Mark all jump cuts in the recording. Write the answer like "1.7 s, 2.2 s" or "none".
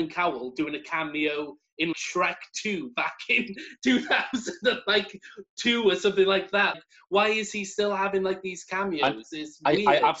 1.9 s, 6.8 s